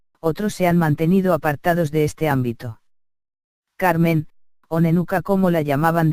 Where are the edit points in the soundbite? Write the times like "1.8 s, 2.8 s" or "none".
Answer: none